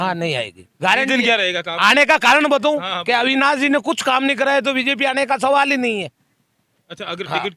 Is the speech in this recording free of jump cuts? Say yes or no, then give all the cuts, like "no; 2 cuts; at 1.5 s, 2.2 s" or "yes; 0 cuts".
yes; 0 cuts